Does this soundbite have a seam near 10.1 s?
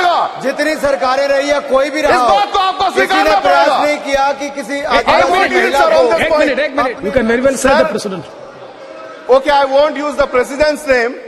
no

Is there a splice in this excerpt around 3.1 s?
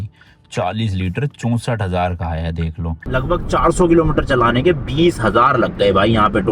yes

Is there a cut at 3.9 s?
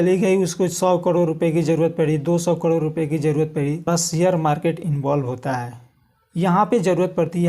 yes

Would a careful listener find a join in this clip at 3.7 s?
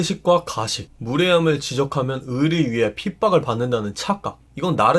no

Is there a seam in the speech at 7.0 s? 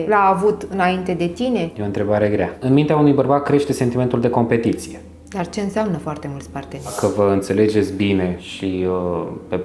yes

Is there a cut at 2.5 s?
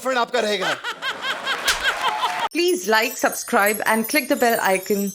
yes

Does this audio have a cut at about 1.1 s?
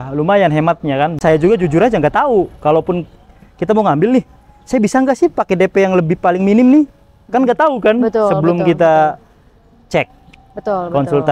yes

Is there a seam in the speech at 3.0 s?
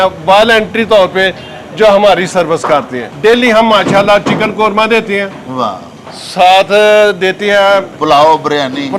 yes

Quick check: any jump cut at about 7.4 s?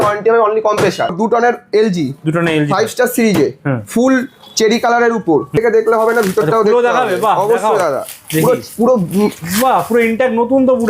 no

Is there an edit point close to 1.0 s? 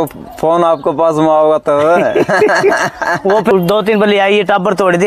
no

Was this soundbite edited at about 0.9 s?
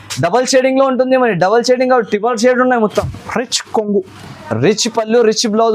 no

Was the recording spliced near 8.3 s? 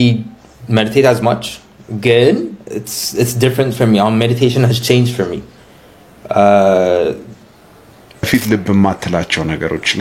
yes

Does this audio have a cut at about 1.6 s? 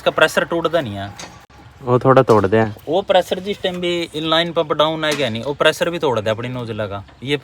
no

